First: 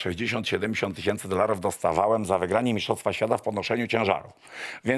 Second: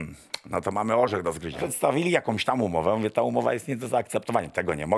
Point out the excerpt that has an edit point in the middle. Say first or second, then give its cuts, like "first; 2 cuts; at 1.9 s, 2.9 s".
second; 1 cut; at 1.6 s